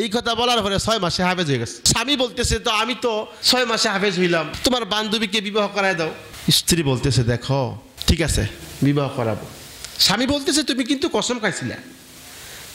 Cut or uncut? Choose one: cut